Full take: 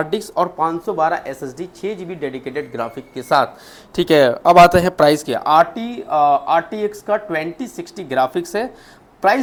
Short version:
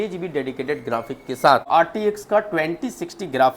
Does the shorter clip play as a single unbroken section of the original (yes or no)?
no